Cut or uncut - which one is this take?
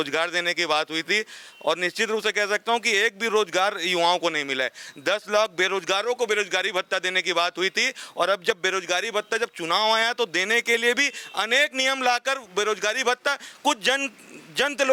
uncut